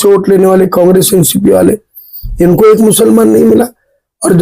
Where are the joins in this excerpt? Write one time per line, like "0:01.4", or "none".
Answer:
none